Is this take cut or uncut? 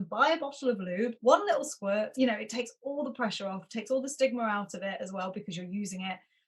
cut